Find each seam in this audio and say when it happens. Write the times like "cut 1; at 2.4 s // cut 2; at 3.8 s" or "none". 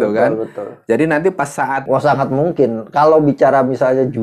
cut 1; at 1.8 s